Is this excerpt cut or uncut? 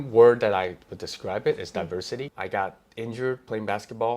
cut